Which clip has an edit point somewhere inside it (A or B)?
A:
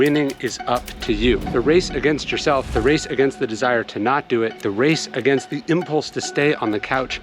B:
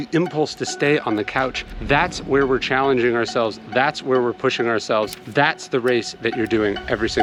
A